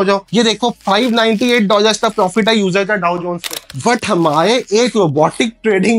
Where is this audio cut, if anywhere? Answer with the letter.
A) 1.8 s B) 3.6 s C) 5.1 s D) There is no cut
B